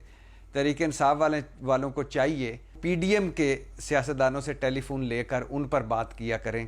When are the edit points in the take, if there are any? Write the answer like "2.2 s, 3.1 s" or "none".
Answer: 2.8 s